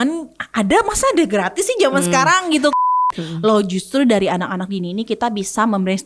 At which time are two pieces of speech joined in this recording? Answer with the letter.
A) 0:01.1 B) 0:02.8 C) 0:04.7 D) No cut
B